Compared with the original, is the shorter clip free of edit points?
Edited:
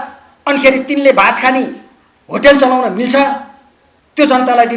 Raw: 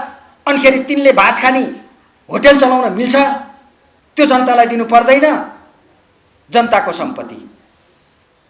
yes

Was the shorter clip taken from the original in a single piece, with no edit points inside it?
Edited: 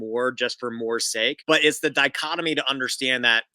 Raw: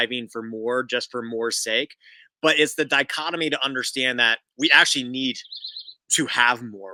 no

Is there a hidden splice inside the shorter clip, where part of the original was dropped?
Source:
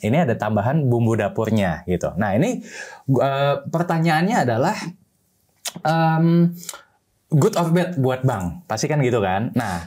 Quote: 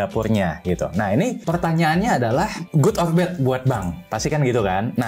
yes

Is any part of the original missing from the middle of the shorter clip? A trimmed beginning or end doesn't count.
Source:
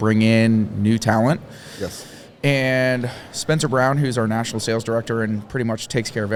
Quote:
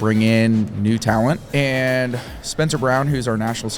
yes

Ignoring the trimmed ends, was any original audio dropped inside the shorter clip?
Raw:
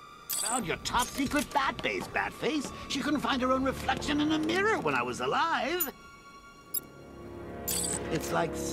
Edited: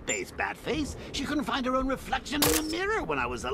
no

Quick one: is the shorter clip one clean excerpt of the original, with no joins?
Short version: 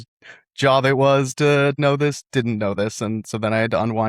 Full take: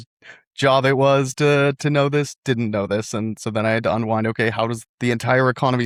no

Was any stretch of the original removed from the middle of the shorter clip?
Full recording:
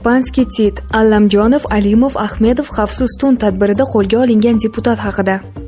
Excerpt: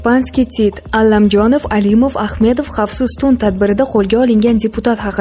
no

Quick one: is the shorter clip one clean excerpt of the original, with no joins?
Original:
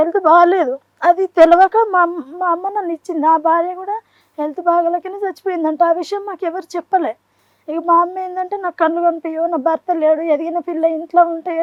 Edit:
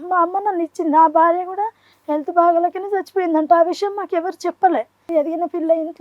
no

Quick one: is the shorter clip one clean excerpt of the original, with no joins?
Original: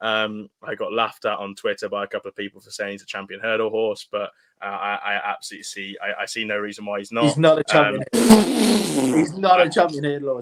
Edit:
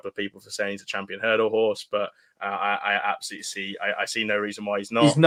yes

